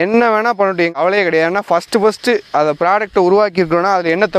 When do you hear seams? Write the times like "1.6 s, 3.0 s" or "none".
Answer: 0.9 s